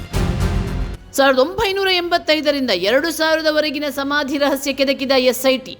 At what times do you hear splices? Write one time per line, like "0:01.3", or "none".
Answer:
0:01.0